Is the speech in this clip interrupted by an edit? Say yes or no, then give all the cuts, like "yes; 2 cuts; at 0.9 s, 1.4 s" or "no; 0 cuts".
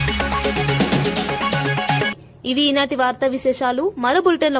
no; 0 cuts